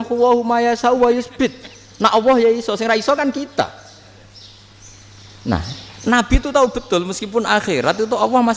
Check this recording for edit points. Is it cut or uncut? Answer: uncut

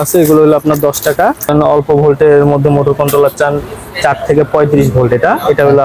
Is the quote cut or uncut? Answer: cut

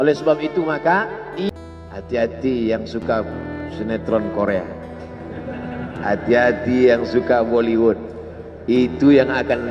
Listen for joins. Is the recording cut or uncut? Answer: cut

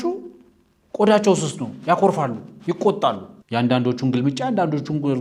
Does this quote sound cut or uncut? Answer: cut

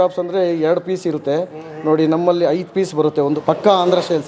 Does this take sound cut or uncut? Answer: cut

